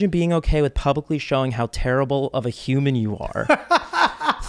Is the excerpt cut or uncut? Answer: uncut